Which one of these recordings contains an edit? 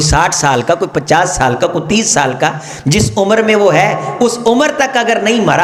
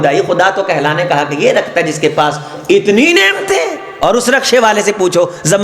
second; 1 cut; at 3.8 s

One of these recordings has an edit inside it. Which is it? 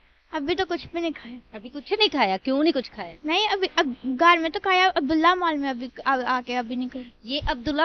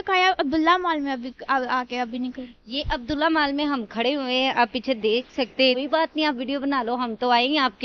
second; 1 cut; at 5.8 s

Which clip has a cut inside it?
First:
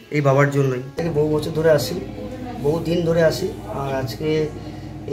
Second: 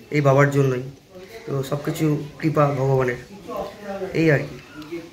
first; 1 cut; at 0.9 s

